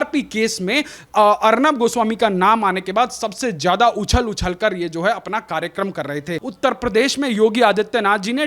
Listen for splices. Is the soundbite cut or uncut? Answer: cut